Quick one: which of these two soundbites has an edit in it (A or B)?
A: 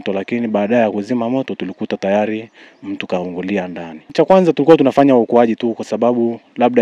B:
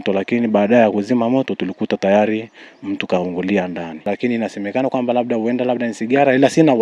B